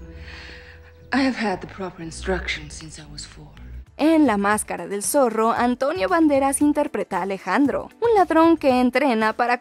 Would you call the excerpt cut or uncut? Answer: uncut